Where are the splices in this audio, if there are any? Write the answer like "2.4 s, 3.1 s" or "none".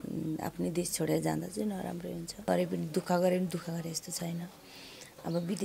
2.5 s

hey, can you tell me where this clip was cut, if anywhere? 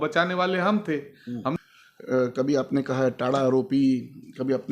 1.5 s

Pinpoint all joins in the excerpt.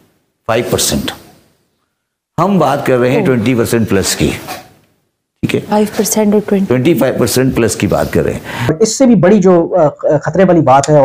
8.7 s

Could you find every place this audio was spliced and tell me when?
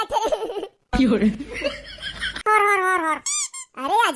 2.4 s

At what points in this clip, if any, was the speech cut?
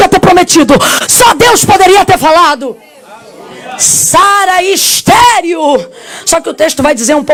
none

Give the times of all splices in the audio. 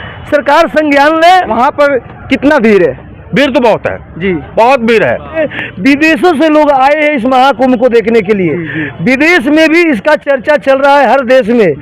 1.5 s, 5.5 s

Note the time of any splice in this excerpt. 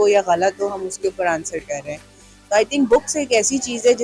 none

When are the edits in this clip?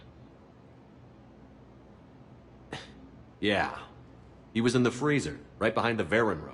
2.7 s

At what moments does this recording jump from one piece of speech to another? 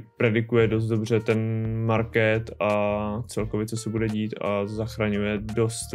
none

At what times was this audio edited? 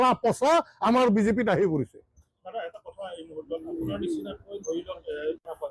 none

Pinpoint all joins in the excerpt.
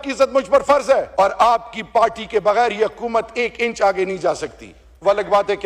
1.2 s

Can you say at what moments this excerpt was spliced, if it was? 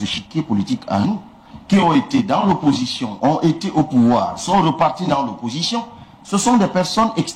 none

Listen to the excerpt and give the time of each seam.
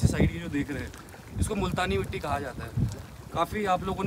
none

